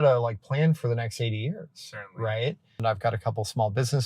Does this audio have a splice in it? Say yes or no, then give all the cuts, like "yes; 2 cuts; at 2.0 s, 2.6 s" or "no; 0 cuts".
yes; 1 cut; at 2.7 s